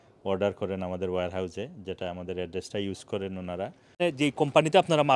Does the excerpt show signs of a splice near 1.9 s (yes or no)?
no